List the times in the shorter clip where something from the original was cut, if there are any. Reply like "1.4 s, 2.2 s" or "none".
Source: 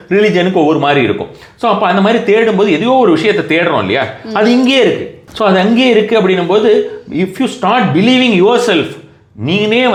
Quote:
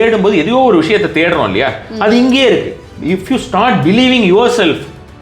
2.9 s